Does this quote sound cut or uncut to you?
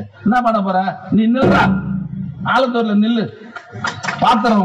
uncut